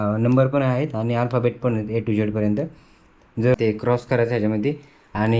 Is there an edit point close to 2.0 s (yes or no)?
no